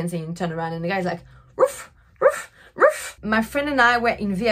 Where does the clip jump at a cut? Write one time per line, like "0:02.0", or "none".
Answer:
0:03.1